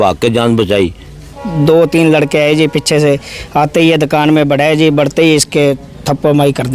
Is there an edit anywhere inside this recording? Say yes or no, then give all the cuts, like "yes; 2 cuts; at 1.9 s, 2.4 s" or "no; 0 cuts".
yes; 1 cut; at 1.4 s